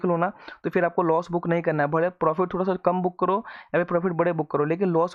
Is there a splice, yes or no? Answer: no